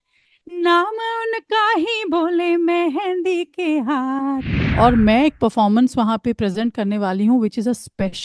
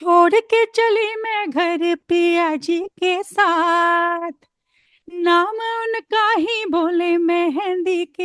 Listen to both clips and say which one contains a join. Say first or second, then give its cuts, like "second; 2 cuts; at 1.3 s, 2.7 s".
first; 1 cut; at 4.6 s